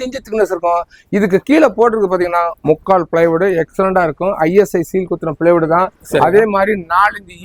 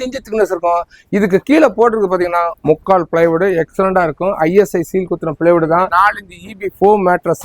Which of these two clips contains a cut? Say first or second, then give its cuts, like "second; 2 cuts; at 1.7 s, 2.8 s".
second; 1 cut; at 5.9 s